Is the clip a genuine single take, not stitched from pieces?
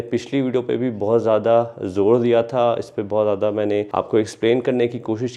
yes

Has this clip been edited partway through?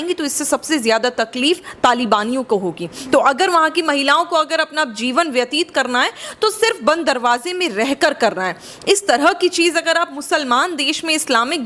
no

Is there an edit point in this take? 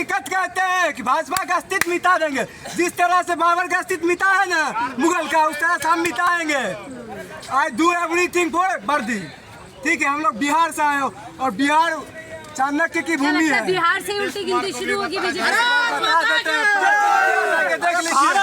no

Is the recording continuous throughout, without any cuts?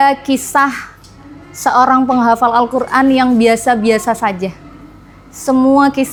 yes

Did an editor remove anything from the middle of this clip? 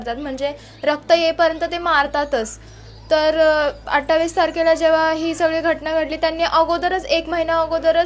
no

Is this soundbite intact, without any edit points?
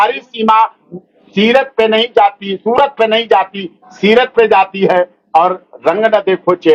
yes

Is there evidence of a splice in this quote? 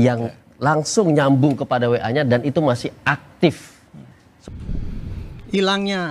yes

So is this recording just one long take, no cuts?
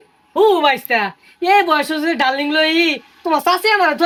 yes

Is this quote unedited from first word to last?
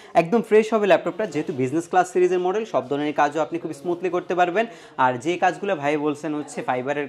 yes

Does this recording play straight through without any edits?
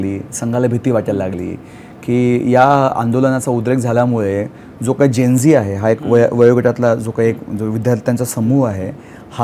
yes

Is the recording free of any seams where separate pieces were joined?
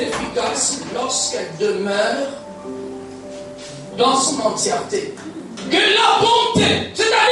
no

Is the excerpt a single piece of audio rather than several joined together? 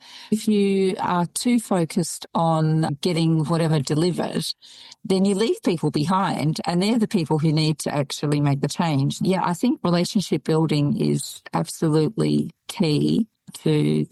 yes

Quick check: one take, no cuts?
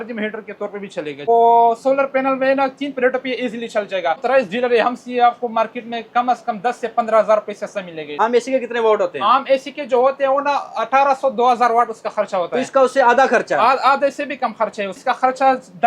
no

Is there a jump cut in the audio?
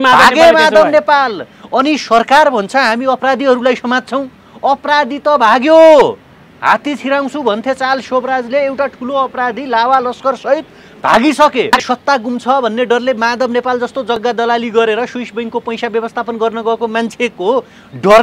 yes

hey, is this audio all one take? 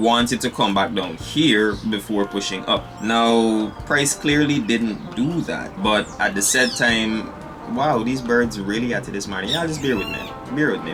yes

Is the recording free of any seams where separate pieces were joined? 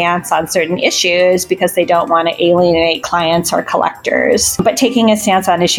no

